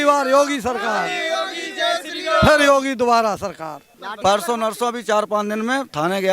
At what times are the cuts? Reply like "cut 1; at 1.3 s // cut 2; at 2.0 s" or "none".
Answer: cut 1; at 4.0 s

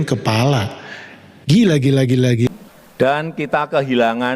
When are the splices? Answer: cut 1; at 2.5 s

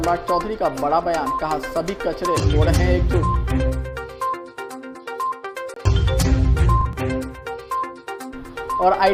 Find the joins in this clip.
none

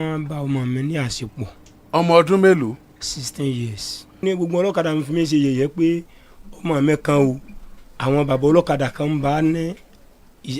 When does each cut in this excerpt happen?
cut 1; at 4.2 s

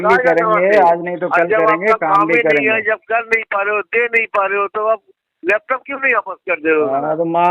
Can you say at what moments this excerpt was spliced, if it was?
none

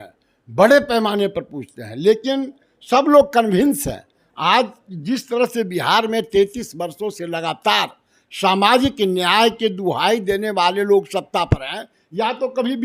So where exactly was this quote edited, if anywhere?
none

